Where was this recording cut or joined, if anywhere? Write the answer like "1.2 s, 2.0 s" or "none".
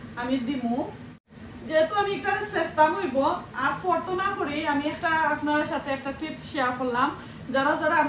1.1 s